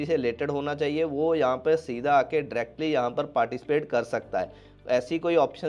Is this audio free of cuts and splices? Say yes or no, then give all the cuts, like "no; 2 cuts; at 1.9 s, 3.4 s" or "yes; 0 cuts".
yes; 0 cuts